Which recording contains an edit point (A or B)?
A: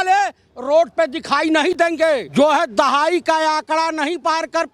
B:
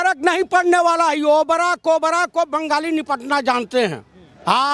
A